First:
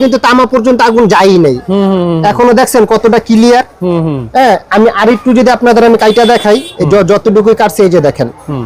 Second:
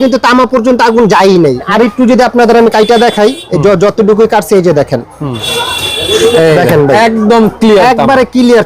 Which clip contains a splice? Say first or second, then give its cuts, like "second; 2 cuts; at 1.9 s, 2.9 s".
second; 2 cuts; at 1.7 s, 5.5 s